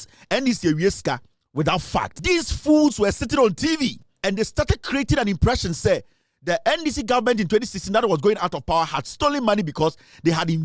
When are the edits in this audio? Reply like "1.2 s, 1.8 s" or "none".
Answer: 2.2 s, 4.1 s